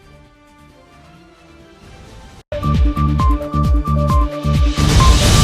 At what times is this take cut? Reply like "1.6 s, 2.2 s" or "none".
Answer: 2.4 s